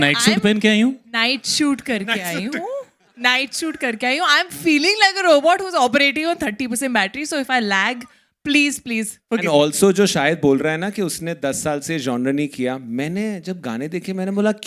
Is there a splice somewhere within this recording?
no; 0 cuts

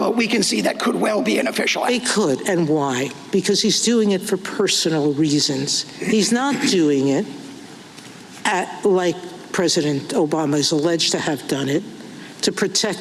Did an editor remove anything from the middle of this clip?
no; 0 cuts

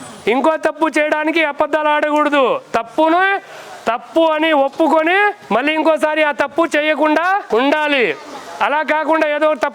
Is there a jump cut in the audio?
yes; 2 cuts; at 5.4 s, 7.4 s

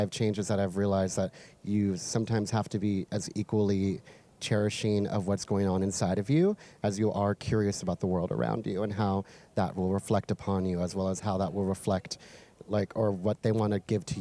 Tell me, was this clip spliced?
no; 0 cuts

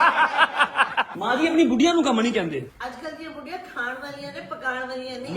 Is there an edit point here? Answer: yes; 2 cuts; at 1.1 s, 2.7 s

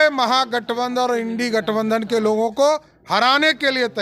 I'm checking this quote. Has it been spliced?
no; 0 cuts

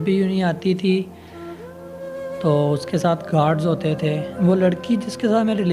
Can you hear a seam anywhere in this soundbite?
yes; 1 cut; at 4.3 s

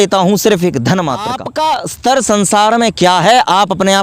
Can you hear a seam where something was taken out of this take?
yes; 1 cut; at 1.4 s

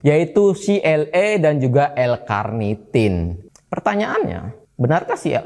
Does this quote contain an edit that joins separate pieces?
yes; 1 cut; at 3.4 s

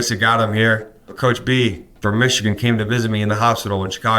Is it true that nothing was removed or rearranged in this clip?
no; 2 cuts; at 1.0 s, 1.9 s

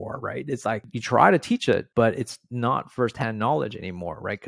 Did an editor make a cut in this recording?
yes; 2 cuts; at 0.9 s, 1.9 s

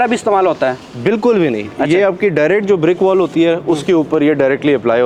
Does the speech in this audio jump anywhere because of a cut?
no; 0 cuts

